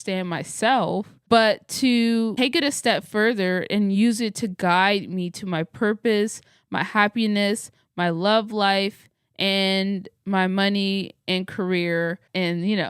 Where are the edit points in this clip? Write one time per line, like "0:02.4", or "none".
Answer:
0:01.1